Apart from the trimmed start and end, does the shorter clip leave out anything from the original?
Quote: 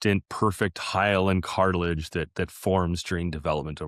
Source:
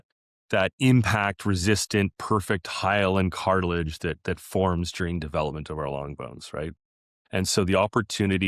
no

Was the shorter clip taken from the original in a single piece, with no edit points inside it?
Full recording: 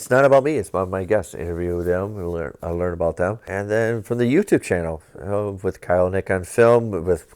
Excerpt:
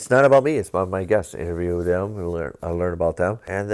yes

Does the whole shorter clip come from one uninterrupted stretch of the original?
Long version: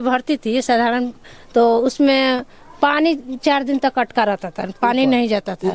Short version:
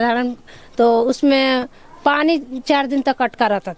yes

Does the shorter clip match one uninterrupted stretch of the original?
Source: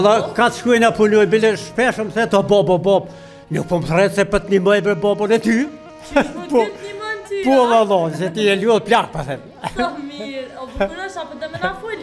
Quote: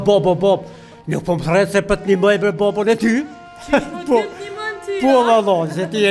yes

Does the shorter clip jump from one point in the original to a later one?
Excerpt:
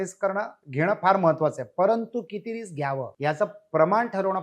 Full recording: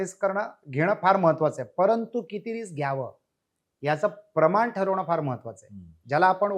yes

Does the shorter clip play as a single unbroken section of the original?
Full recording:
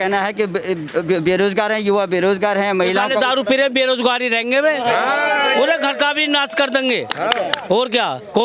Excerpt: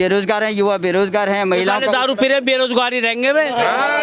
yes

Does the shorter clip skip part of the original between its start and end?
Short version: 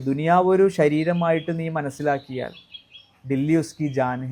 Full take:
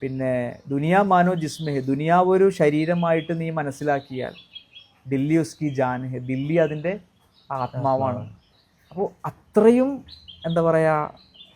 no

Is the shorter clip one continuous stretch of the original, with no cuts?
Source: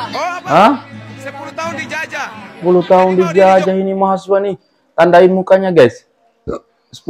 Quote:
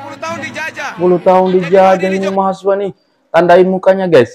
no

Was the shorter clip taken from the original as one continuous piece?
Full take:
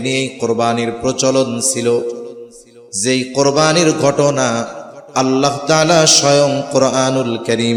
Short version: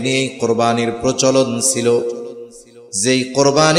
yes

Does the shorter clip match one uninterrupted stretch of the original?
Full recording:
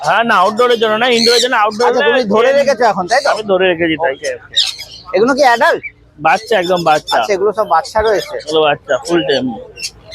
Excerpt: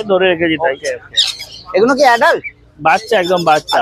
yes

